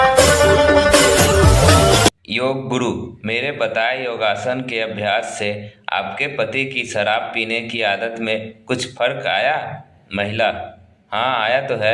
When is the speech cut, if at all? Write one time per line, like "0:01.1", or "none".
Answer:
none

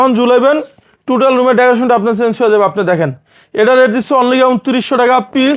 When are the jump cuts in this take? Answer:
none

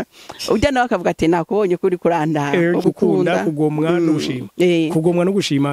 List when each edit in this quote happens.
0:02.8

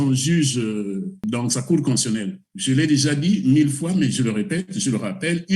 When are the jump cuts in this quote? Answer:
0:01.3
0:02.4

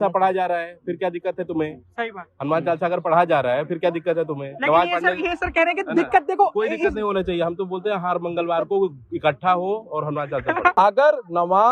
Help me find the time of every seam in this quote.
0:10.7

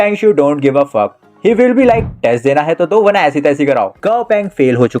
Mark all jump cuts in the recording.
0:03.9

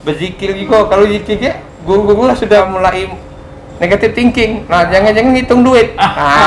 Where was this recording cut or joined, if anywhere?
0:02.6

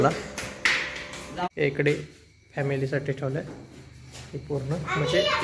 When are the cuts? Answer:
0:01.5

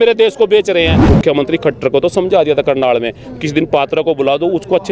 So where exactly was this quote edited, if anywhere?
0:01.0

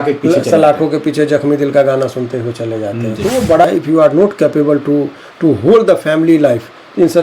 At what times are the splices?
0:03.7

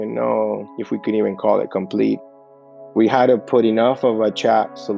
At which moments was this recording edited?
0:02.4

